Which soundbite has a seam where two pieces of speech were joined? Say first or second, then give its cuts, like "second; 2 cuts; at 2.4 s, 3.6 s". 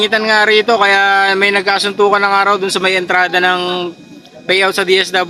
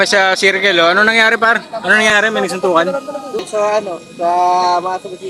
second; 2 cuts; at 2.1 s, 3.4 s